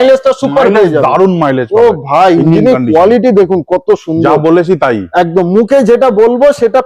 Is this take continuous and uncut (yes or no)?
yes